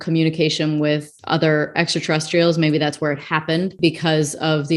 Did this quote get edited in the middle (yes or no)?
yes